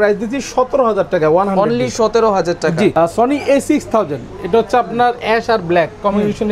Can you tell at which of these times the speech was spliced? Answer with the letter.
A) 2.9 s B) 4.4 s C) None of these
A